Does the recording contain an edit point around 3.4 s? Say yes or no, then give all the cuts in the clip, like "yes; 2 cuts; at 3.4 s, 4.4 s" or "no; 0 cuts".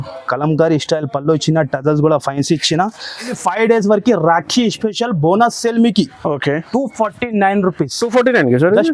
yes; 1 cut; at 3.4 s